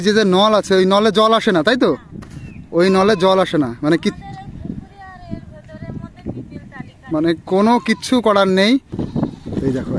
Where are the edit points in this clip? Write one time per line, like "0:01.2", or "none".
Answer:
0:09.0